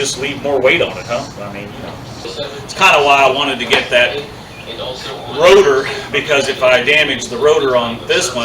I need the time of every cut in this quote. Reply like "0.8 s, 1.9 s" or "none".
2.2 s